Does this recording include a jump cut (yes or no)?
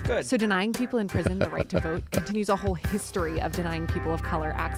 no